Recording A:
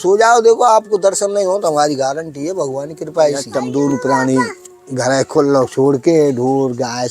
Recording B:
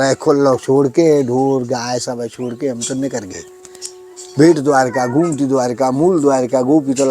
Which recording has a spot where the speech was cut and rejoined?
A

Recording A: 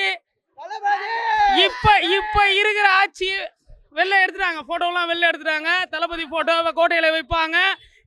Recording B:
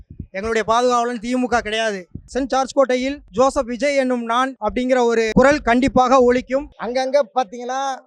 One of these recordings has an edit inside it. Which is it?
B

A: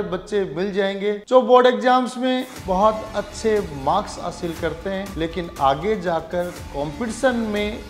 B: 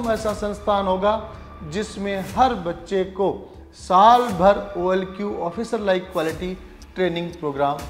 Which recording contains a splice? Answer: A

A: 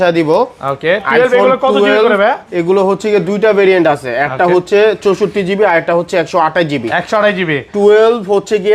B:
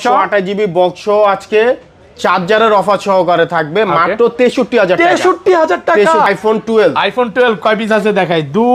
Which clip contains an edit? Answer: B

